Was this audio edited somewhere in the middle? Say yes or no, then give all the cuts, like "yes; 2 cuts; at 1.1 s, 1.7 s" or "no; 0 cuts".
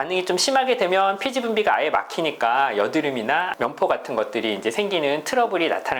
yes; 1 cut; at 3.5 s